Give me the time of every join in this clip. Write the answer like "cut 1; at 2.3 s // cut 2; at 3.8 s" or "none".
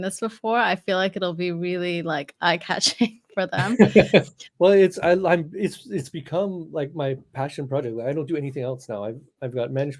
none